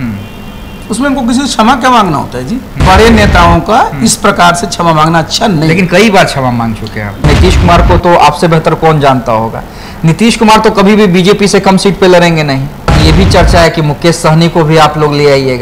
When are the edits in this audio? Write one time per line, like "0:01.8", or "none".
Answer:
0:02.7
0:07.3
0:13.0